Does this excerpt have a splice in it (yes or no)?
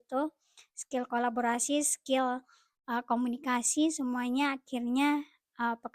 no